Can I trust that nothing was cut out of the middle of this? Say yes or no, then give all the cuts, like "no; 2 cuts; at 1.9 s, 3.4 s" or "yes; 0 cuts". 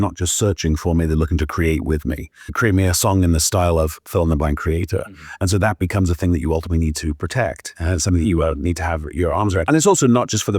no; 2 cuts; at 2.4 s, 9.6 s